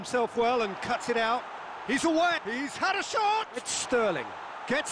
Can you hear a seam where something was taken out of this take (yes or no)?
yes